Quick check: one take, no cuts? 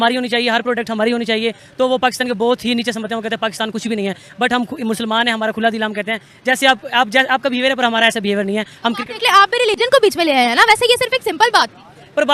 yes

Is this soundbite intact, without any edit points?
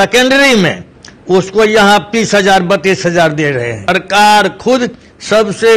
no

